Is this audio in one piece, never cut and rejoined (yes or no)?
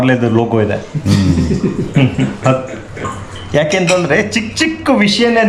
yes